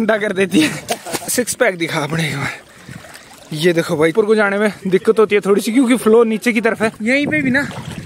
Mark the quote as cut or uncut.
cut